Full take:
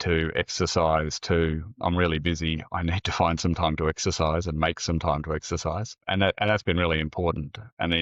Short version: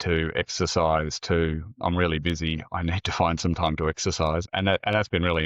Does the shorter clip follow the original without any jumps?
no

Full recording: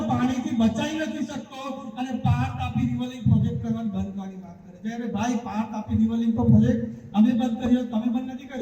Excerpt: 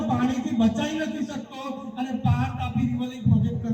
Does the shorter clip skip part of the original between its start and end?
no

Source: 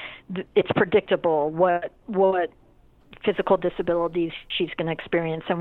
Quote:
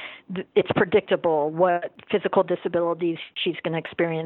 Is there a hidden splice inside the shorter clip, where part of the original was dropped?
yes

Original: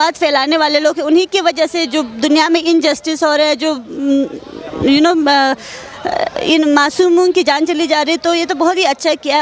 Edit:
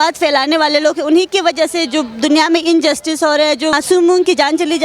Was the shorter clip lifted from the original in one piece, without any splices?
no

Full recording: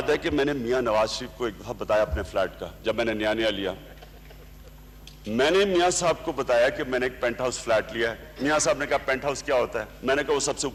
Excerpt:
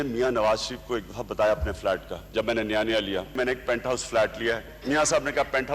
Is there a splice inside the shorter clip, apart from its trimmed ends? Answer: yes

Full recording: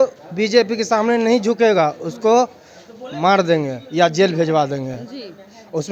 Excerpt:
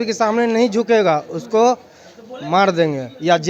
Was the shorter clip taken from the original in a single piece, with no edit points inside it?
yes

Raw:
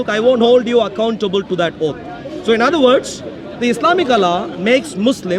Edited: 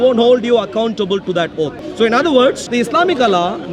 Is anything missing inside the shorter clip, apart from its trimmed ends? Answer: yes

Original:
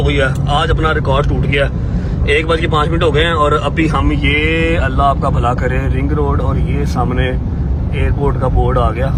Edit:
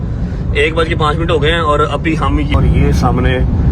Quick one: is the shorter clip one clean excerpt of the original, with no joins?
no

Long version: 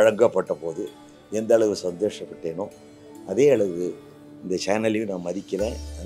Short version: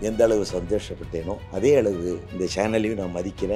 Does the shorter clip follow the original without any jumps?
no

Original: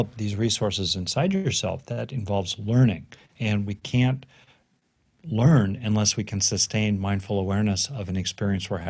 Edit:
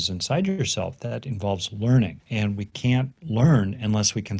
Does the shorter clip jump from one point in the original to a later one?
yes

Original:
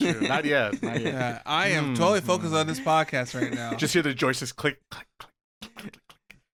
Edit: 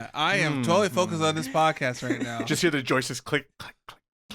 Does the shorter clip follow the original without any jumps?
yes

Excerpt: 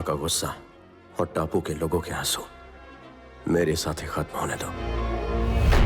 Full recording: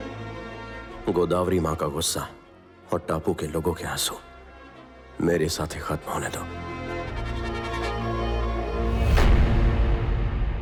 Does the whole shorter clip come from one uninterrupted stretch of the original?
no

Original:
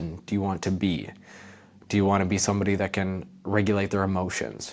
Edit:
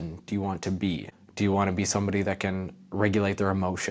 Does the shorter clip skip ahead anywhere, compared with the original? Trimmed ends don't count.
yes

